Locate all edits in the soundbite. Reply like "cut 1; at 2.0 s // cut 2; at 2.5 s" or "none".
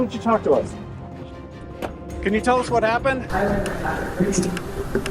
cut 1; at 3.2 s